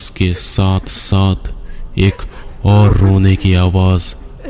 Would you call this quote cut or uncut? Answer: uncut